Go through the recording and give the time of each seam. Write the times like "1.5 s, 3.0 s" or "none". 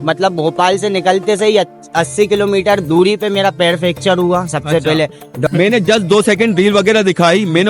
5.4 s